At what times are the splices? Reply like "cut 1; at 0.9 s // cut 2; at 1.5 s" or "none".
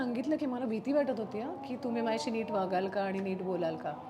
none